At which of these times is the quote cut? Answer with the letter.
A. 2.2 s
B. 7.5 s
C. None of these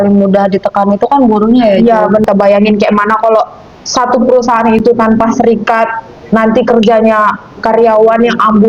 A